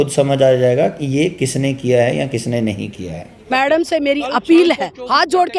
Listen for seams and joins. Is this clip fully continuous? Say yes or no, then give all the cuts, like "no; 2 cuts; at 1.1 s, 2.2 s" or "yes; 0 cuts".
no; 1 cut; at 3.4 s